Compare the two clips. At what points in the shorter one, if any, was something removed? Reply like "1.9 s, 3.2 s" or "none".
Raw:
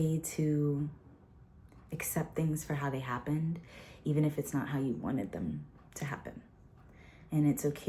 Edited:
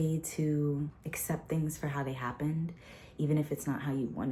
1.1 s